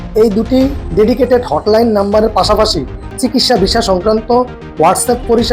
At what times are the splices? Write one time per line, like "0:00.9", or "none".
0:03.2